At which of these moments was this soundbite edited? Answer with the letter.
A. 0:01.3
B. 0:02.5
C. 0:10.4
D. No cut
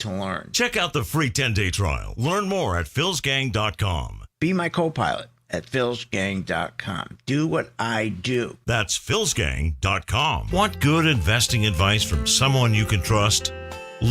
C